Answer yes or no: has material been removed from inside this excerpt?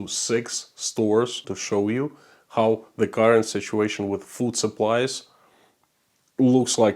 yes